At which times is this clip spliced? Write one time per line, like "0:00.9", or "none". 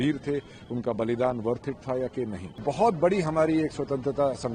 0:02.4